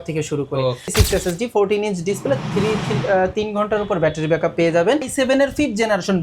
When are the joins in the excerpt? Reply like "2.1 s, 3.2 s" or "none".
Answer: 0.8 s, 5.1 s